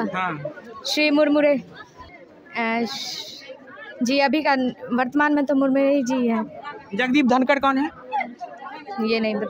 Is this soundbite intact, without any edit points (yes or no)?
no